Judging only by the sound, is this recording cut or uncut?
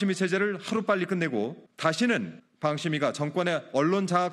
cut